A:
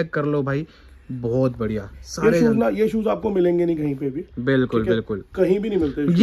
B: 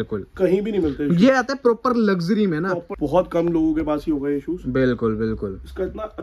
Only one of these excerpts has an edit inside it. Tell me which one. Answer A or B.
B